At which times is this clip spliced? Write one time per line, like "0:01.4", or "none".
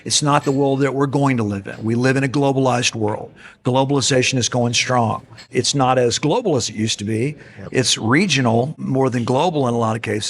0:05.5
0:08.8